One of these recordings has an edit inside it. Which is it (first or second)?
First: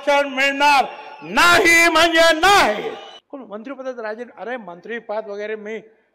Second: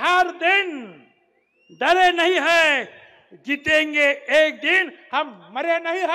first